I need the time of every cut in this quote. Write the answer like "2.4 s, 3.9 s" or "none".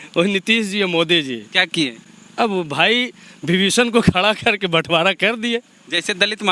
none